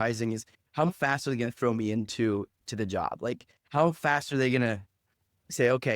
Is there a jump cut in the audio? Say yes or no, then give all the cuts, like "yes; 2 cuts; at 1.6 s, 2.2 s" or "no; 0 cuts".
yes; 2 cuts; at 0.9 s, 2.6 s